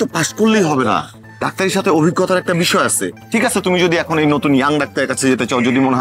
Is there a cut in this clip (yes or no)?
no